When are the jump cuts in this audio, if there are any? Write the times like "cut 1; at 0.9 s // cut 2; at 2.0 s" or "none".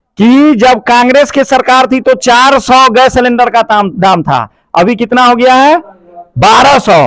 none